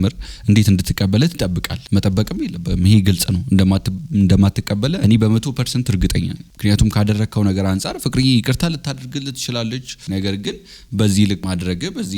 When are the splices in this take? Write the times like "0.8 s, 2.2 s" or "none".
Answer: 9.9 s, 11.4 s

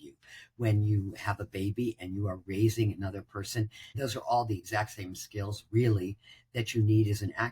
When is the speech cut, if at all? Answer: 4.0 s

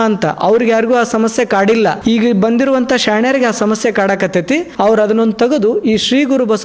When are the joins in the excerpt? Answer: 2.0 s, 4.7 s

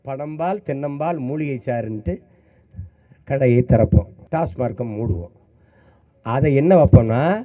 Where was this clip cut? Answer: 4.2 s

